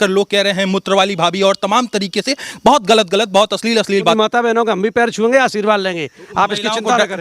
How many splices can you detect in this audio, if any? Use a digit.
1